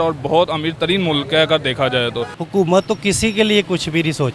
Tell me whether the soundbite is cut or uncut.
cut